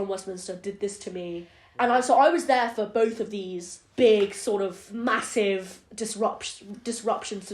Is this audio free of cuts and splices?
no; 2 cuts; at 1.6 s, 4.8 s

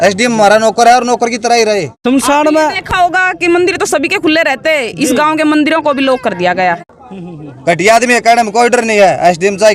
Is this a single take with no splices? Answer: no; 2 cuts; at 1.9 s, 6.9 s

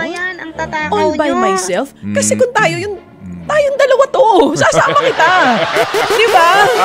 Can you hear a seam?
no; 0 cuts

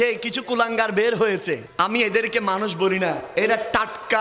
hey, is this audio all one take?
no; 1 cut; at 1.7 s

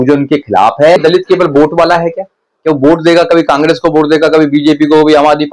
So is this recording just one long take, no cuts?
no; 1 cut; at 1.0 s

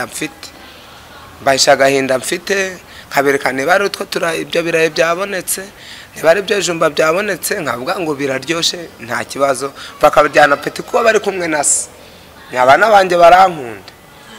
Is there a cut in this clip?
no; 0 cuts

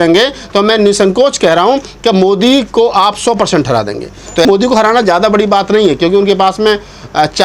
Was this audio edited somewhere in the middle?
yes; 1 cut; at 4.5 s

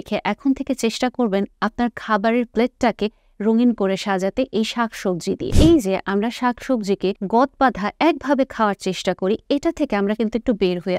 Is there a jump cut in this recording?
yes; 2 cuts; at 5.5 s, 7.2 s

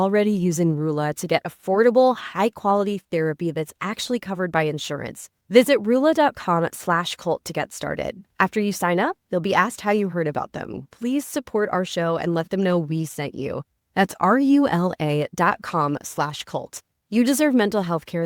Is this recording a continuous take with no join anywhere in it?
yes; 0 cuts

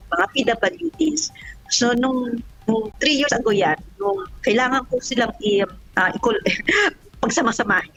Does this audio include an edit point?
no; 0 cuts

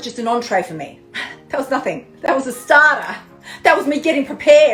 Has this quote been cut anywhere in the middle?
no; 0 cuts

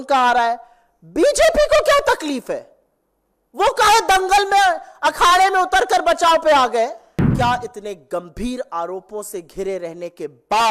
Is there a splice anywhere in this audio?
yes; 1 cut; at 7.3 s

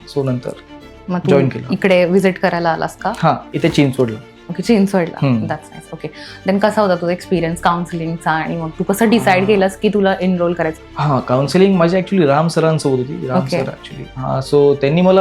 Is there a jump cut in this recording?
yes; 1 cut; at 10.8 s

